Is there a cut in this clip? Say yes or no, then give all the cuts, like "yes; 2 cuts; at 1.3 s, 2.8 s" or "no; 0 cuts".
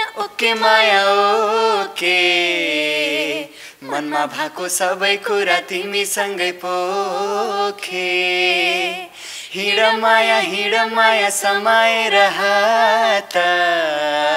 no; 0 cuts